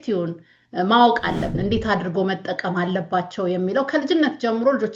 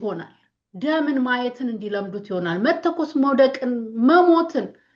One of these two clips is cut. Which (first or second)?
first